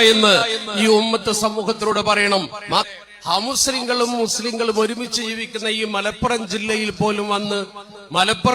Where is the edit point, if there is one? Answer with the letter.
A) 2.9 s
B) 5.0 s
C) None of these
A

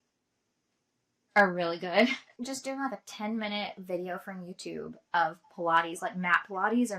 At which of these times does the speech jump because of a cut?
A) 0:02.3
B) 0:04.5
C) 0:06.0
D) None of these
A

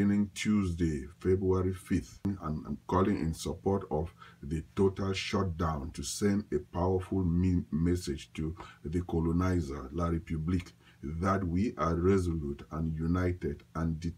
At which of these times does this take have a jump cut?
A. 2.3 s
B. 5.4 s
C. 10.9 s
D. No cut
A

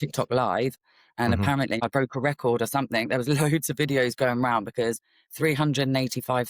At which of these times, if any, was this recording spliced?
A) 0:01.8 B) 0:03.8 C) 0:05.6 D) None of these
A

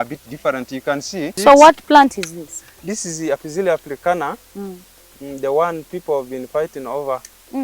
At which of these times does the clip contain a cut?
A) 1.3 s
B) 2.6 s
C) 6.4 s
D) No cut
A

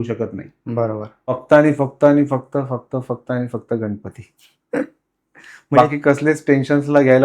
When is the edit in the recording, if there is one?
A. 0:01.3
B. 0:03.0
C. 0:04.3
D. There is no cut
A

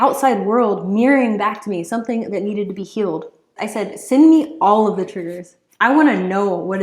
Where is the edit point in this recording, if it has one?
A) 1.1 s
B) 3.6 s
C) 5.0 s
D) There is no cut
B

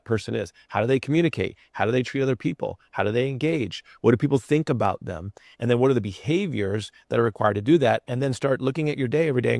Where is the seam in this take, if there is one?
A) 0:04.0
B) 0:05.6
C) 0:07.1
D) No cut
D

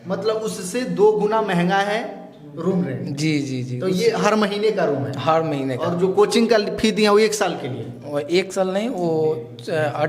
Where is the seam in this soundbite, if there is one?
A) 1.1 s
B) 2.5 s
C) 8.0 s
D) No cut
D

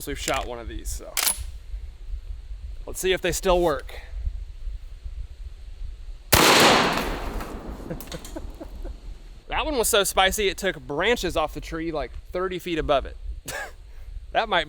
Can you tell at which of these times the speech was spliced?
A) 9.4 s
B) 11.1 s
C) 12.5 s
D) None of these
A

